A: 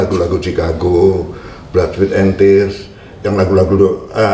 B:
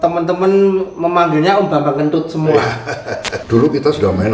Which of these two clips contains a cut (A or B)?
B